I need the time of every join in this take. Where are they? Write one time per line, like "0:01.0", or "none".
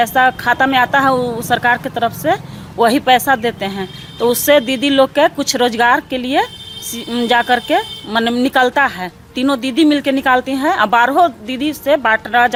none